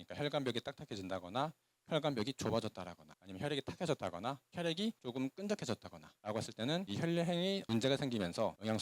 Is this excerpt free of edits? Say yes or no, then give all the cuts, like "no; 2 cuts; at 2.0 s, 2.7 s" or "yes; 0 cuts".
yes; 0 cuts